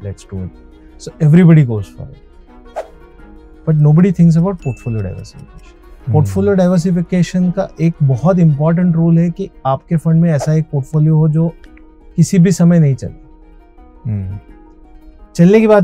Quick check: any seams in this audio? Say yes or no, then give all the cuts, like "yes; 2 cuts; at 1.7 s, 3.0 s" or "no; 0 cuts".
no; 0 cuts